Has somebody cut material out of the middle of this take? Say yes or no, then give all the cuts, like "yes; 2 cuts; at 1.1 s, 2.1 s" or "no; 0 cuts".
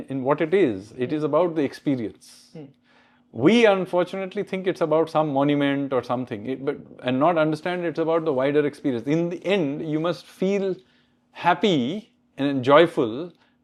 no; 0 cuts